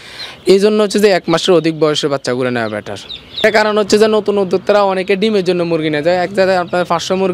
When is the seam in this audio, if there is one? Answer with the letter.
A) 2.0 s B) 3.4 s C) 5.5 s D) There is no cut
B